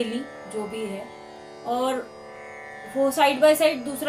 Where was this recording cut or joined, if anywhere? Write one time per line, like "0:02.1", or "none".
none